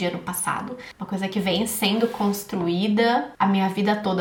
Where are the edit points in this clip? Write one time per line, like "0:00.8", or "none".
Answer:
none